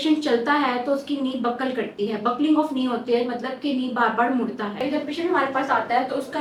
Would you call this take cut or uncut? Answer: cut